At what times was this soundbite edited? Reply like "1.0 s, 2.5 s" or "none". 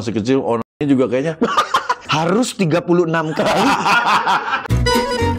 2.0 s, 4.6 s